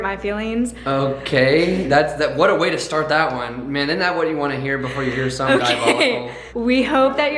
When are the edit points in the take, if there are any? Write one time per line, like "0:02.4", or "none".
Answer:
0:06.4